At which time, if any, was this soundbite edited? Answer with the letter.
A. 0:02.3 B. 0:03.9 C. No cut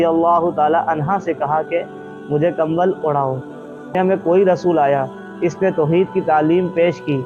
B